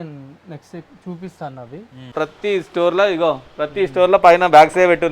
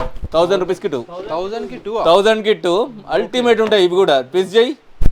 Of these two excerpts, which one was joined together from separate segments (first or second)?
first